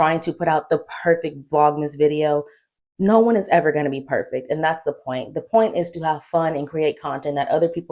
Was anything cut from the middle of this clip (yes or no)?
no